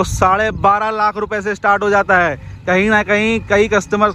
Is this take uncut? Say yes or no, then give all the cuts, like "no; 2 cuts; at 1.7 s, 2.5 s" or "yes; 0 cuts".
yes; 0 cuts